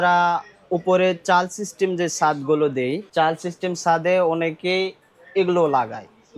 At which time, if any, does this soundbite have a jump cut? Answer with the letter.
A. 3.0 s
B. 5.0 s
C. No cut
A